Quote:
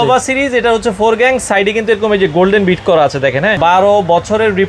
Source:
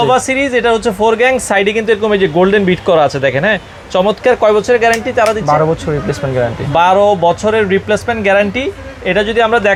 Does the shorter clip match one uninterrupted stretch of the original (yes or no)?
no